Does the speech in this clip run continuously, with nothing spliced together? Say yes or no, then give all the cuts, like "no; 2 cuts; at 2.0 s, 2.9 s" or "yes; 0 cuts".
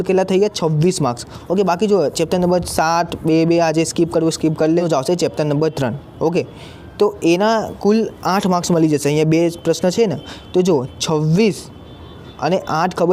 no; 1 cut; at 4.8 s